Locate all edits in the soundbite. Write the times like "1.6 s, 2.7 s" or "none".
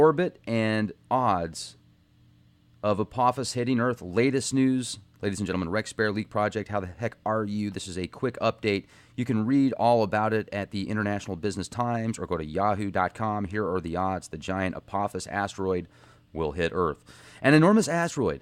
16.7 s